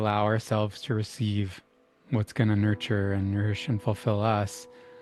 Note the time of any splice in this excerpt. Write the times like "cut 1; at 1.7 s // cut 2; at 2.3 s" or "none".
none